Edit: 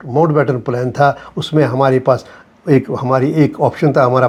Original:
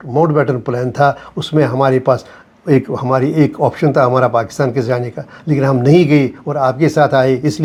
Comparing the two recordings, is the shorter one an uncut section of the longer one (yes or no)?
yes